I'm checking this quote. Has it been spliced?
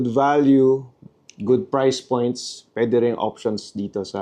yes; 1 cut; at 1.1 s

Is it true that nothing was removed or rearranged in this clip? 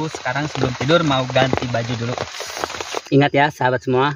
no; 1 cut; at 3.0 s

